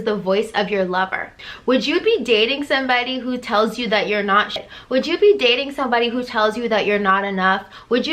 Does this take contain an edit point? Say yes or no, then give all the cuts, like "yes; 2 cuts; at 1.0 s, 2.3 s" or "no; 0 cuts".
yes; 1 cut; at 4.6 s